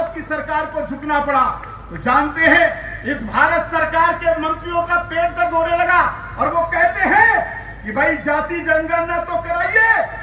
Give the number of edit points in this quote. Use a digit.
0